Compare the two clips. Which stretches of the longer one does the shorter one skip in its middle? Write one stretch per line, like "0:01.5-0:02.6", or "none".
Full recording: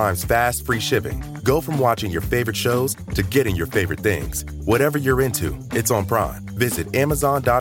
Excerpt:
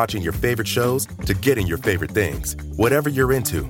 none